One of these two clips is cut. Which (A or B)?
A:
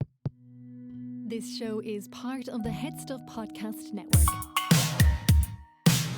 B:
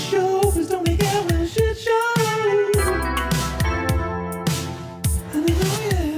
A